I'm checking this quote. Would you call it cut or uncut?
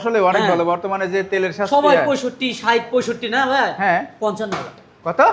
uncut